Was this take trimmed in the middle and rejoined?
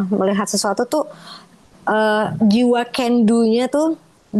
no; 0 cuts

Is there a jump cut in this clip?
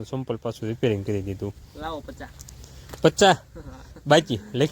no; 0 cuts

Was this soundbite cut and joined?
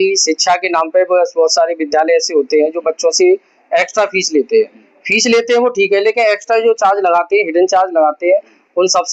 no; 0 cuts

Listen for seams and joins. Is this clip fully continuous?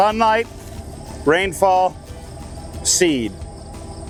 yes; 0 cuts

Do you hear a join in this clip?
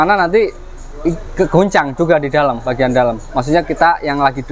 no; 0 cuts

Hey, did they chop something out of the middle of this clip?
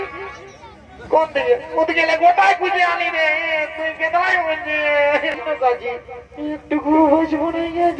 yes; 1 cut; at 5.4 s

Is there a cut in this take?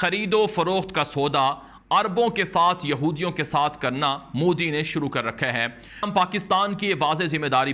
yes; 1 cut; at 6.0 s

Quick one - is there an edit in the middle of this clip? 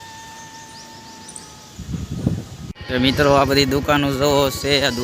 yes; 1 cut; at 2.6 s

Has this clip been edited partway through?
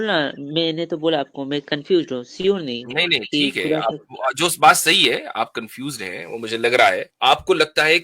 yes; 1 cut; at 7.1 s

